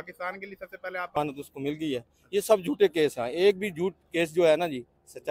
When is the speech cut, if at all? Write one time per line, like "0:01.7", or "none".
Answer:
0:01.2